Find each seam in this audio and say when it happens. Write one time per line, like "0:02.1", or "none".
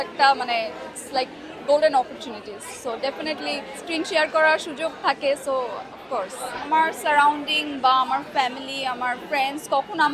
0:03.7
0:06.7